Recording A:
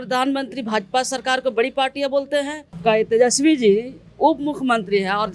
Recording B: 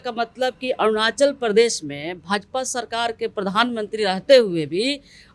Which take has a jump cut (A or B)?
A